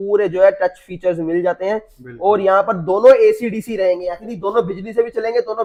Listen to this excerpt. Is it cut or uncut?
uncut